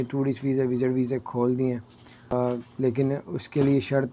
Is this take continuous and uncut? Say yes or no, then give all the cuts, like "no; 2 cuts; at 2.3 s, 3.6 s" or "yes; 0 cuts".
no; 1 cut; at 2.3 s